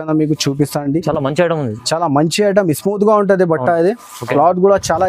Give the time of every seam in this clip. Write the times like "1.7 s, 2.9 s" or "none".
4.2 s